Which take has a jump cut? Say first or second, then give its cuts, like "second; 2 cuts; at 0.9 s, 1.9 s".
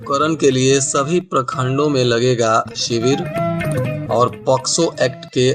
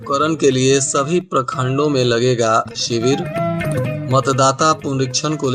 first; 1 cut; at 4.0 s